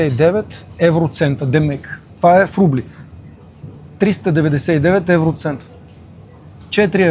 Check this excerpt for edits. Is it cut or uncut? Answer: uncut